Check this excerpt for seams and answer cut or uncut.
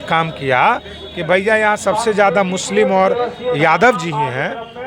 uncut